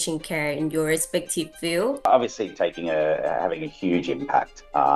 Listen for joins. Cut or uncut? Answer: cut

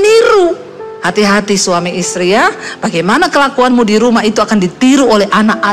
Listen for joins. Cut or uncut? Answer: uncut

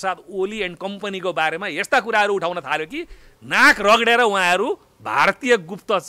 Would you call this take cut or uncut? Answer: uncut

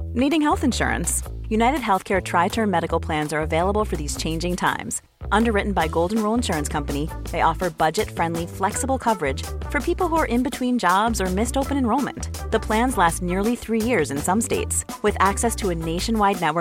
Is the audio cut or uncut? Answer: uncut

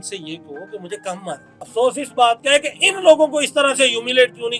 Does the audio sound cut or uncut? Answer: cut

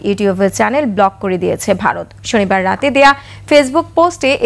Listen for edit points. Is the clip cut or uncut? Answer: uncut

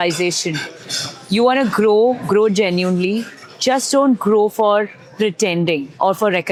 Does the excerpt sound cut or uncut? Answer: uncut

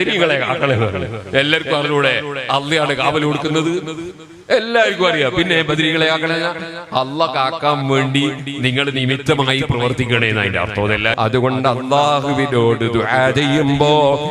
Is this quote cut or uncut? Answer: cut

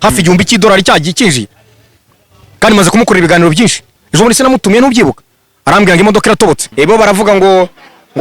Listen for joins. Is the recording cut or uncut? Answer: cut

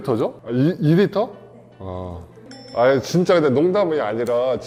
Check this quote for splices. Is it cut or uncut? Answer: uncut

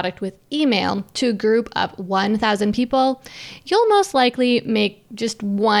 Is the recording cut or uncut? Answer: uncut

